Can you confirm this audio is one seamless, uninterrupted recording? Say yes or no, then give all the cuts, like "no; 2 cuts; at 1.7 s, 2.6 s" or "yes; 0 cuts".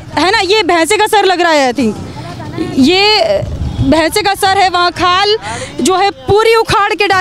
yes; 0 cuts